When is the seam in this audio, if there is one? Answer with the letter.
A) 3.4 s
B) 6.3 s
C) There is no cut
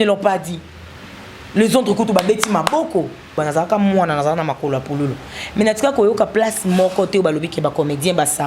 A